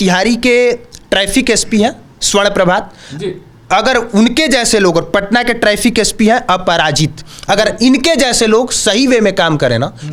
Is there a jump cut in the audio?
no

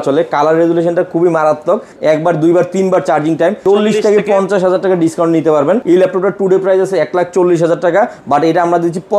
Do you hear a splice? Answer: yes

